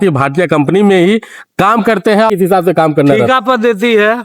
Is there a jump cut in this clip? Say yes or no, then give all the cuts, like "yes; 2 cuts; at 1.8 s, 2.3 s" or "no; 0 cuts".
no; 0 cuts